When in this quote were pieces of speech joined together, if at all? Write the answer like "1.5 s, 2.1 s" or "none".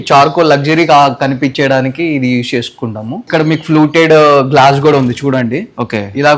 3.2 s